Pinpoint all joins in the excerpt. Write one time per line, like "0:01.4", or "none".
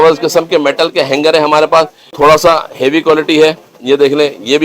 0:02.0